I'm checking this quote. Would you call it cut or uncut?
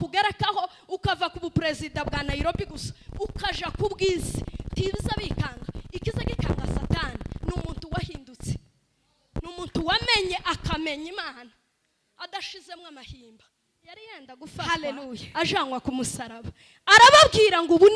cut